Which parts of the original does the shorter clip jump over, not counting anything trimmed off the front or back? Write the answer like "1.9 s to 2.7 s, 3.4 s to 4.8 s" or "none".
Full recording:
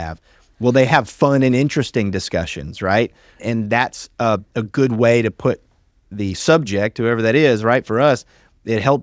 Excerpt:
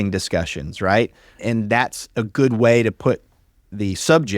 4.1 s to 4.5 s